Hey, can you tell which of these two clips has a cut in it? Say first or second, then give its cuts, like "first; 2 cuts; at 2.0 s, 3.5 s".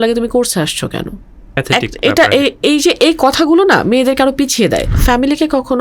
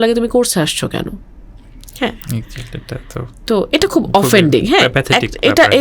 first; 2 cuts; at 1.6 s, 4.9 s